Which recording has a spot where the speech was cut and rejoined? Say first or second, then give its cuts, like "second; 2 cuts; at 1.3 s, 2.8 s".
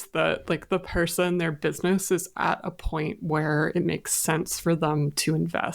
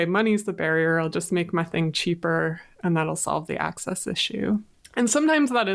second; 1 cut; at 4.8 s